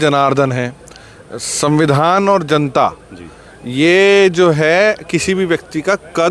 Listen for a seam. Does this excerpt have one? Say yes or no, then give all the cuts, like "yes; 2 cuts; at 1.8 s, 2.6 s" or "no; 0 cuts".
no; 0 cuts